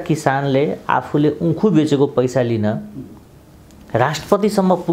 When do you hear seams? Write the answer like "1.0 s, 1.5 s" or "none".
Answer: none